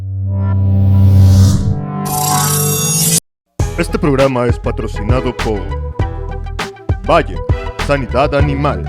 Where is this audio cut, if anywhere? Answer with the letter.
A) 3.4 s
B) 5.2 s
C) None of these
A